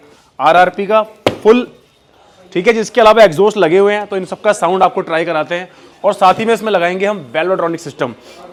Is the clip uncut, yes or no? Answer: yes